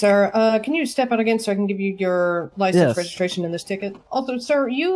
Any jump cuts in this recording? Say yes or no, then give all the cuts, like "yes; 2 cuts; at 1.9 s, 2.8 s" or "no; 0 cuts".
yes; 1 cut; at 3.9 s